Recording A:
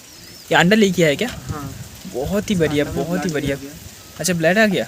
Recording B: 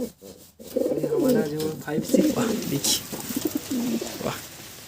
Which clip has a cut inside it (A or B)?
B